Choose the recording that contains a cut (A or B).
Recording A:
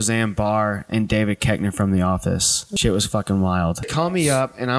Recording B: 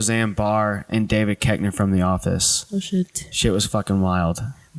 A